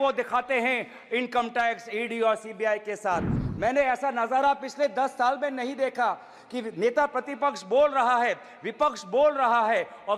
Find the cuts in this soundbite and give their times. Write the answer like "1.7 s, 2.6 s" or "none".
3.4 s

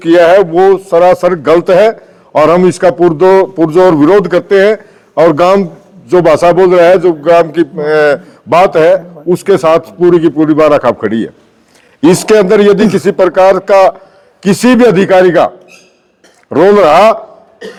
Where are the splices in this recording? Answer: none

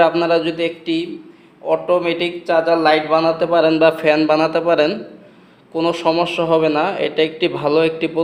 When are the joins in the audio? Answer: none

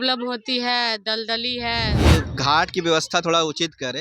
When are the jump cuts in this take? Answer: 2.2 s

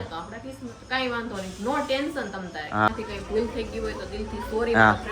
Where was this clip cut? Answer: 2.9 s

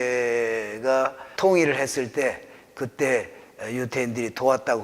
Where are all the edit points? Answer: 1.2 s

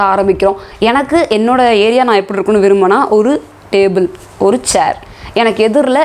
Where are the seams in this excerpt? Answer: none

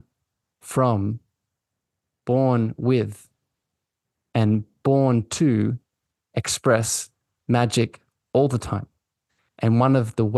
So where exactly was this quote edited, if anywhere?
none

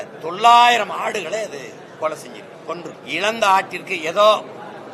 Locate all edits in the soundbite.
3.0 s

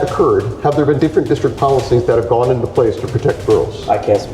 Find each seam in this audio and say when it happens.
1.0 s

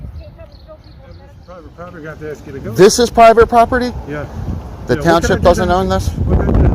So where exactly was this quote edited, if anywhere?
1.7 s

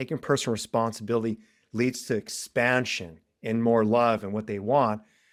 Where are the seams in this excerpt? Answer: none

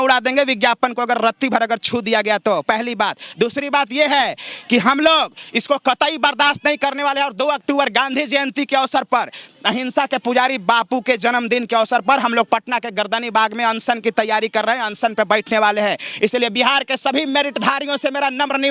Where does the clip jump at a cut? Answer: none

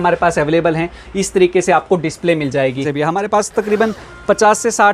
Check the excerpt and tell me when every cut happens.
2.8 s

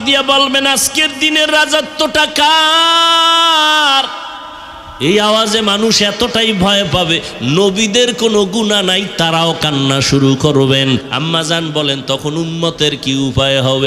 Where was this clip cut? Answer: 11.1 s

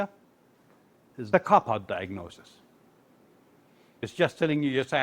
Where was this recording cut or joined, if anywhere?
1.1 s, 4.0 s

